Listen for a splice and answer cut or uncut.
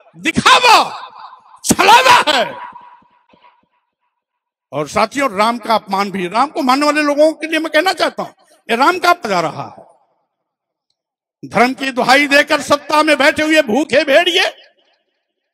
cut